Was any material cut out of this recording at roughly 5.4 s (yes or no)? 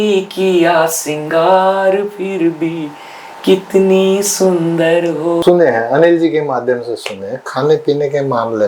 yes